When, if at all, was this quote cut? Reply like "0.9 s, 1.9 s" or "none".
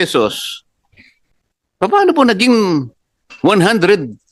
none